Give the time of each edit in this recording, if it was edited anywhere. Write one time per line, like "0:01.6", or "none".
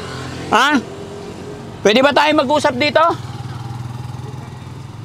none